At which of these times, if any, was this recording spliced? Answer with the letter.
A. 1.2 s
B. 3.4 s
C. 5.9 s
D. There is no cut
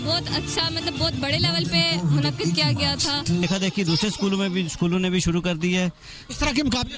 B